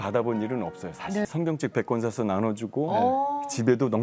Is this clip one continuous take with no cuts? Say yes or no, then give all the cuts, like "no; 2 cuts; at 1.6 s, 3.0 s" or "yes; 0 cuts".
no; 1 cut; at 1.3 s